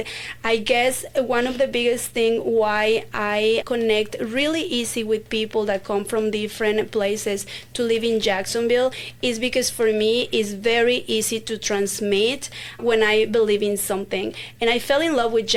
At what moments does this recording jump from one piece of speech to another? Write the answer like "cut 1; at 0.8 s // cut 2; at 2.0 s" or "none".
none